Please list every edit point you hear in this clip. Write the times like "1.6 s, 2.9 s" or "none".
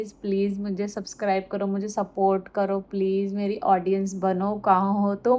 none